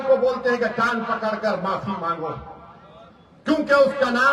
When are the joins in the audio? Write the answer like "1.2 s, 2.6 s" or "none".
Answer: none